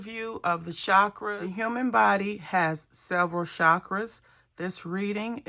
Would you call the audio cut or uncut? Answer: cut